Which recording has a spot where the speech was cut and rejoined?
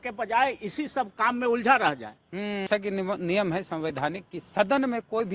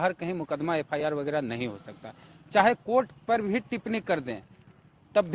first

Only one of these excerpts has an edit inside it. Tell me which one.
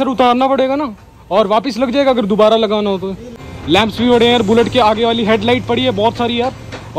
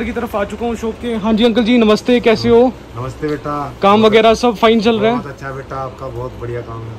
first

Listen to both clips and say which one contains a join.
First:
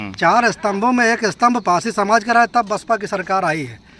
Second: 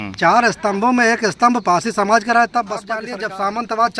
second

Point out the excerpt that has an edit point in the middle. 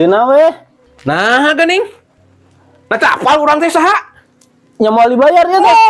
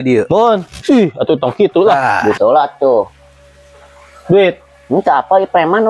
second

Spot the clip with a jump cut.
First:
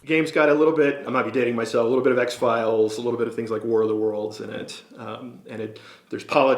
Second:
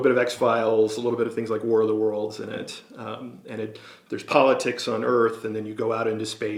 first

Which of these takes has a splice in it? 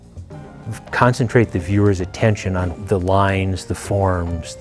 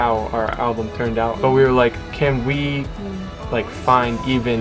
first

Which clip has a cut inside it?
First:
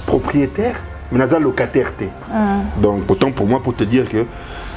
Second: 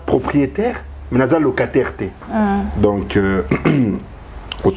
first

